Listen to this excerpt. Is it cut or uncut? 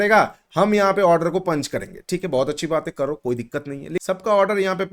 cut